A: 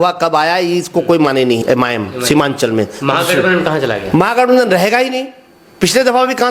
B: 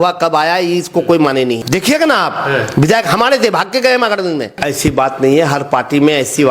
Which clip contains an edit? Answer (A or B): B